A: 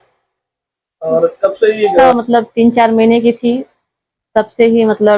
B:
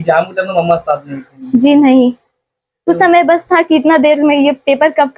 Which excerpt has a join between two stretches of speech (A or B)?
A